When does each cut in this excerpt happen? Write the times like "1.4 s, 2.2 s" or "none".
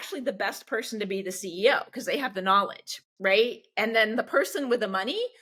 none